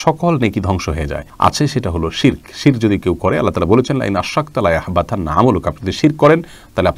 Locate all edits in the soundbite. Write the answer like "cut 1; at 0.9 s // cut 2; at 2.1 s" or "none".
none